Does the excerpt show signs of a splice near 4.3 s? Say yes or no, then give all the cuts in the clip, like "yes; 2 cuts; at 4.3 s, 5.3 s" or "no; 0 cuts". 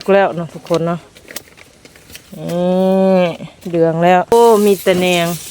yes; 1 cut; at 4.3 s